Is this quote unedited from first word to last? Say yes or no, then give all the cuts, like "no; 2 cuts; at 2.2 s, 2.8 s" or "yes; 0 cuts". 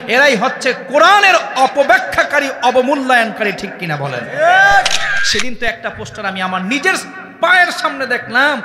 no; 1 cut; at 5.1 s